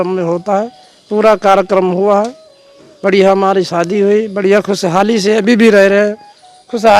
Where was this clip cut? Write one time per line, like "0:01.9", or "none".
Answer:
none